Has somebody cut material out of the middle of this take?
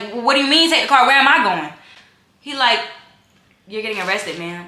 no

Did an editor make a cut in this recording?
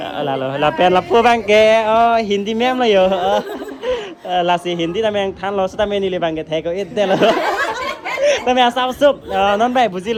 no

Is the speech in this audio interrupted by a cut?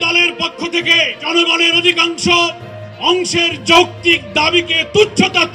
yes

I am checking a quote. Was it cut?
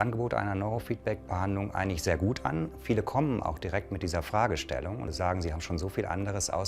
yes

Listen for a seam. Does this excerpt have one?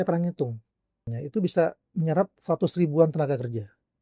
yes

